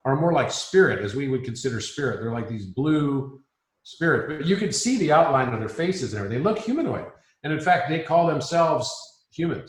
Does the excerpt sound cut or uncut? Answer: uncut